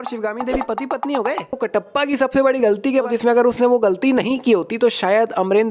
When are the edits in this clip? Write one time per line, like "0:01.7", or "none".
0:01.6
0:03.1